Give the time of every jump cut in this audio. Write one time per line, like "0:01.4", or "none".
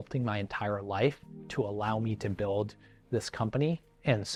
none